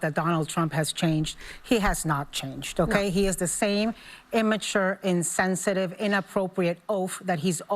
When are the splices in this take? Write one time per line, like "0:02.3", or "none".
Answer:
none